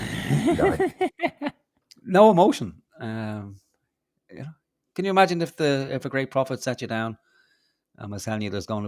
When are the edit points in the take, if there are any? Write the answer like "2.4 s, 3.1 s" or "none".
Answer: 1.7 s